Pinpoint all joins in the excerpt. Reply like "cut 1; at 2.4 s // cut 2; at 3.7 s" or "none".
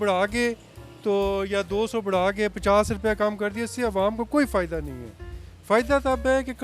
none